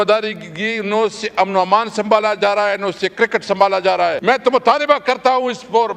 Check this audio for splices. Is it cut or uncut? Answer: cut